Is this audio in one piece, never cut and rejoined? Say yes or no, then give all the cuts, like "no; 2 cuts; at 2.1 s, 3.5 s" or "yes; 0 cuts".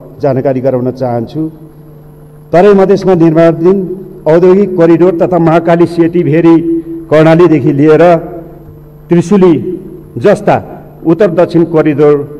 yes; 0 cuts